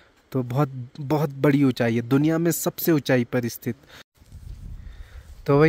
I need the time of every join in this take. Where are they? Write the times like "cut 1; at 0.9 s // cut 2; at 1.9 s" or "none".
cut 1; at 4.1 s